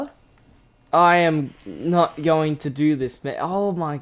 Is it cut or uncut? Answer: uncut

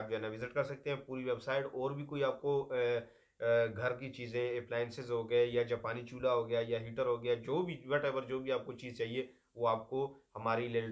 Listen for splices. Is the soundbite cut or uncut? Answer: uncut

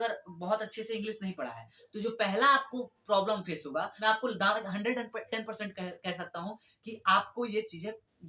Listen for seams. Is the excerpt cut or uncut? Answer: cut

